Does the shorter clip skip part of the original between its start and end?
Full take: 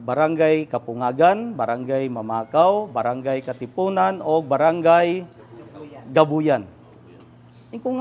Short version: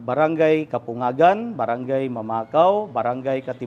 no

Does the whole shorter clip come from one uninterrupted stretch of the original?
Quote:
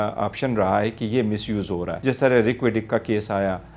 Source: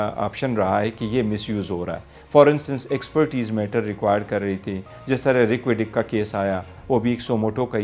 no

